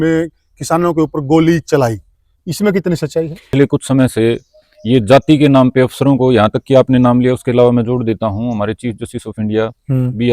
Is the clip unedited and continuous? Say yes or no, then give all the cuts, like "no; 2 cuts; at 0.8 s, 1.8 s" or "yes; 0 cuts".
no; 1 cut; at 3.4 s